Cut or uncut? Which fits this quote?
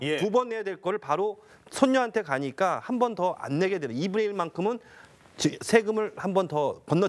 uncut